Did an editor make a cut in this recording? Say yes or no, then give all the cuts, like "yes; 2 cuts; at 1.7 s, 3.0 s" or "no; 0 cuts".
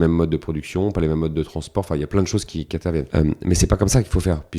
yes; 1 cut; at 3.1 s